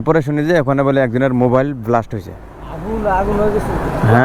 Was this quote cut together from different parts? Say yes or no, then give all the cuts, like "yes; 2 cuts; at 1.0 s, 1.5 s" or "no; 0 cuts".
no; 0 cuts